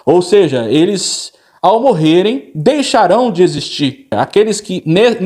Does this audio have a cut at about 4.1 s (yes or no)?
yes